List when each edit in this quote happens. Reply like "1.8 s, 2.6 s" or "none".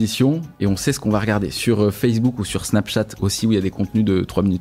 none